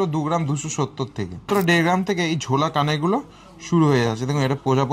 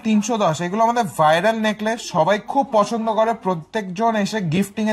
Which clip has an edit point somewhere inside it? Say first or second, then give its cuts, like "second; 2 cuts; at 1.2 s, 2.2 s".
first; 1 cut; at 1.4 s